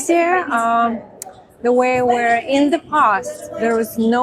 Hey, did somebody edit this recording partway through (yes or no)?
no